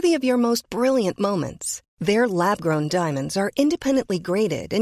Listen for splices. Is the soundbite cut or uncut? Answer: uncut